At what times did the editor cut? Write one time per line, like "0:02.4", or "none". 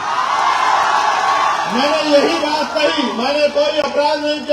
none